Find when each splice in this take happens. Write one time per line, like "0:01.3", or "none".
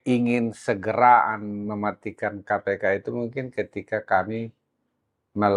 none